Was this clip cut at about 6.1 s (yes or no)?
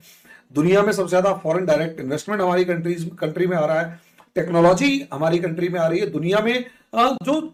no